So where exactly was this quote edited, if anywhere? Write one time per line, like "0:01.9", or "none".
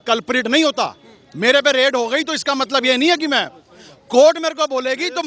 none